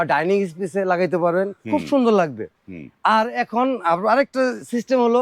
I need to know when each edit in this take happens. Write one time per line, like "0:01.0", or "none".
none